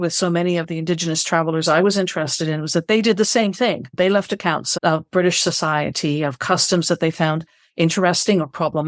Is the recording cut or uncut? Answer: cut